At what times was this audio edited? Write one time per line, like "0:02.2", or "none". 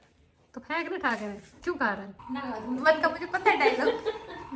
0:02.2